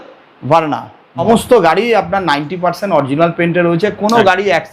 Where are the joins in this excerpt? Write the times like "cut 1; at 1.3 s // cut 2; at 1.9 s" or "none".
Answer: cut 1; at 1.2 s